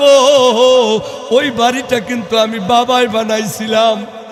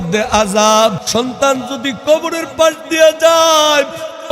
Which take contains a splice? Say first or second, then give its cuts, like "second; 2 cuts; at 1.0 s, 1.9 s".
second; 1 cut; at 1.0 s